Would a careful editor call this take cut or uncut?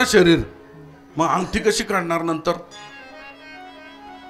uncut